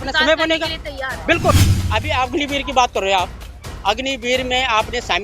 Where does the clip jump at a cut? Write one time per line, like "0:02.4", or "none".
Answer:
0:01.6